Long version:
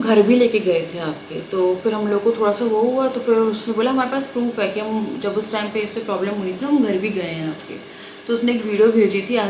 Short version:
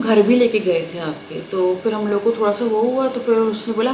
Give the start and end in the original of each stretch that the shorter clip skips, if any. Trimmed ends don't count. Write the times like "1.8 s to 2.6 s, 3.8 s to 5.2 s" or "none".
none